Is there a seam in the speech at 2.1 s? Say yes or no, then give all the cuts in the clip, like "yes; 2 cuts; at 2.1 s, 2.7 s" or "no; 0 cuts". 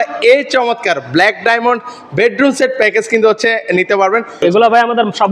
no; 1 cut; at 4.4 s